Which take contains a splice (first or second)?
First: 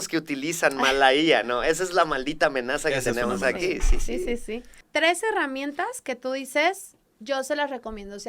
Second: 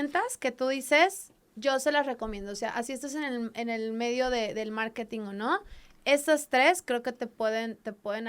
first